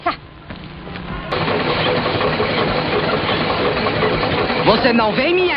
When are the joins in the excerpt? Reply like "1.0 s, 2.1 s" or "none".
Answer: 1.3 s